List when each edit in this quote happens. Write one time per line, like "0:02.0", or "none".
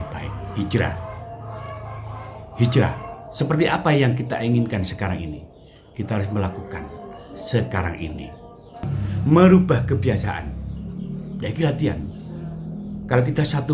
0:08.9